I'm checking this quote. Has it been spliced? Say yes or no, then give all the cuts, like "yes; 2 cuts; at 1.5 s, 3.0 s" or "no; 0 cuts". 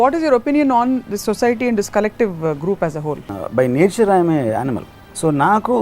yes; 1 cut; at 3.4 s